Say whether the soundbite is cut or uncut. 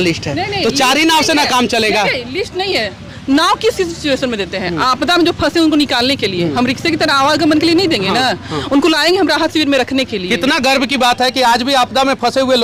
uncut